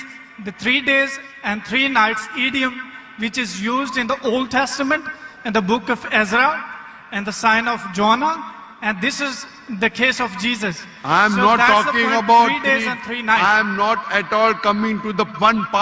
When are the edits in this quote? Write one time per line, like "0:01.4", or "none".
none